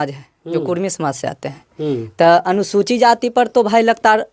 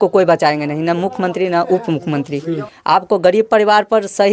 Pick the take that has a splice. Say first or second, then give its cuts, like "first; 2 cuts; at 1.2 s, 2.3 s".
second; 1 cut; at 2.7 s